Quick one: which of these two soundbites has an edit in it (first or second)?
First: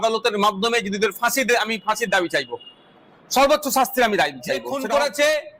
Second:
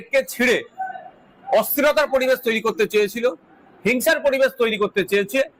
first